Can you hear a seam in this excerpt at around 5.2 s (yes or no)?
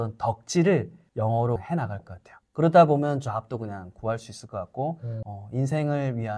yes